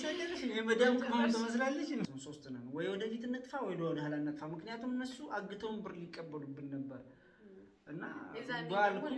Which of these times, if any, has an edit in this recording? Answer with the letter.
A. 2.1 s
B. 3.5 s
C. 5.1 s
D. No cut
A